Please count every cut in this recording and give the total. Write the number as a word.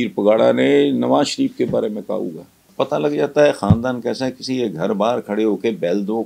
one